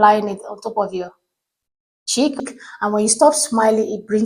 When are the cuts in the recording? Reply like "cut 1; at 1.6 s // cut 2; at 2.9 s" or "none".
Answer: cut 1; at 2.5 s

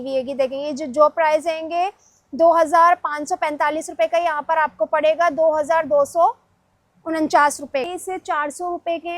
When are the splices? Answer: cut 1; at 7.9 s

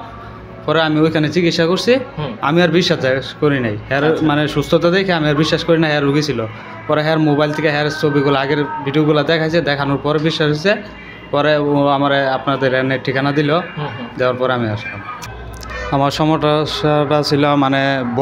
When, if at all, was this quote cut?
cut 1; at 15.3 s

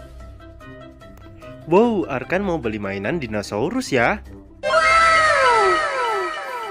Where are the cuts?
cut 1; at 0.9 s

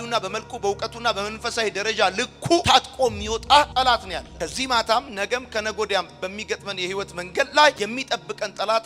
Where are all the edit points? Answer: none

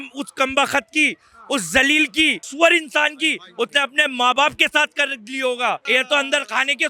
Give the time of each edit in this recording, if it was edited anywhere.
cut 1; at 2.4 s // cut 2; at 5.8 s

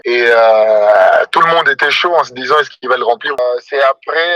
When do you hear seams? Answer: cut 1; at 3.4 s

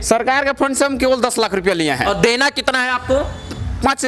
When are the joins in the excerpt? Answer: none

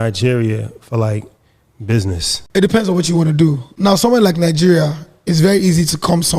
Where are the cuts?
cut 1; at 2.3 s // cut 2; at 3.7 s

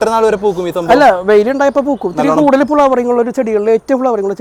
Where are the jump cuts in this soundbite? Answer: none

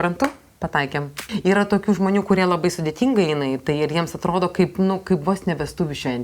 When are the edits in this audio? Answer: cut 1; at 1.1 s

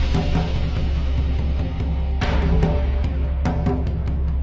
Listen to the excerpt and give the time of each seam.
none

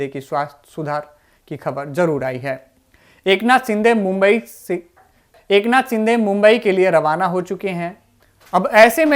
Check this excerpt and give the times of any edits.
cut 1; at 5.3 s

